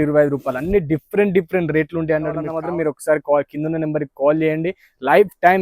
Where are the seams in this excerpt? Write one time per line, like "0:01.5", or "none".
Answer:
0:02.5